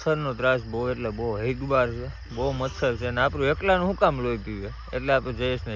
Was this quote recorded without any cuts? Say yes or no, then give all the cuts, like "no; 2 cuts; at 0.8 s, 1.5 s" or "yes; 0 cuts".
yes; 0 cuts